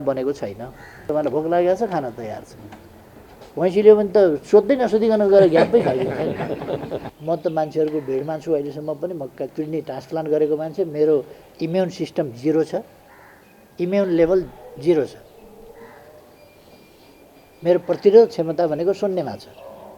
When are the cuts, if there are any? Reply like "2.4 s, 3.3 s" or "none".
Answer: 1.0 s, 7.1 s